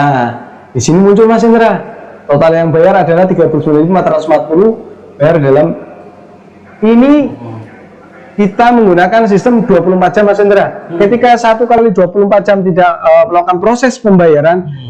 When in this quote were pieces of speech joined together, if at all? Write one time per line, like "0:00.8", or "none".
none